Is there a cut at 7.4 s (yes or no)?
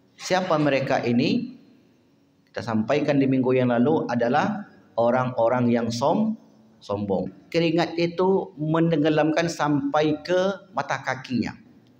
yes